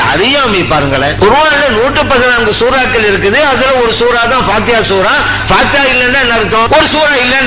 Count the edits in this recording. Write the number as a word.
three